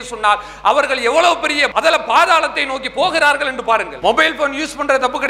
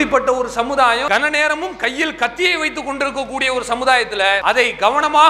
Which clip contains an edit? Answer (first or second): second